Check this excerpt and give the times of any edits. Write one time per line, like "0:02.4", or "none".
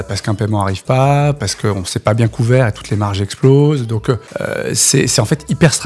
0:01.4
0:04.3